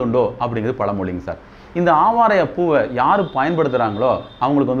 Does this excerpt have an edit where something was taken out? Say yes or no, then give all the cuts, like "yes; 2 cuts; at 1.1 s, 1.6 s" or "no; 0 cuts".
no; 0 cuts